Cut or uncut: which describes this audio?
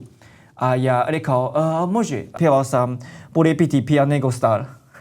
cut